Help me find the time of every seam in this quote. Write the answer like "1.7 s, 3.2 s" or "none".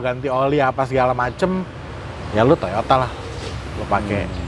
none